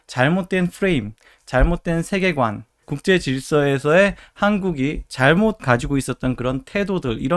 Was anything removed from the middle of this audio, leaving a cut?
no; 0 cuts

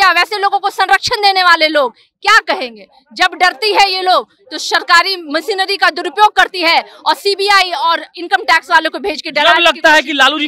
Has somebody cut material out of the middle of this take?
no; 0 cuts

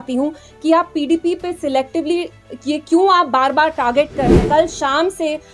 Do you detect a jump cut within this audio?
yes; 1 cut; at 4.4 s

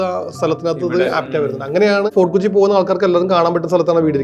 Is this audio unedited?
no; 1 cut; at 2.1 s

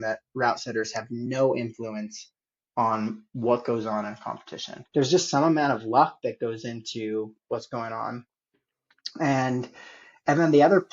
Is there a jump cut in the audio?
yes; 1 cut; at 4.7 s

